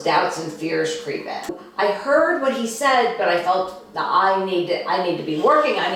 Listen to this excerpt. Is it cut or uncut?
cut